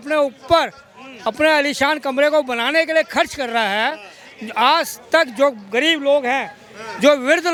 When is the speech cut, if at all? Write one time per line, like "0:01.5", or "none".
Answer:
none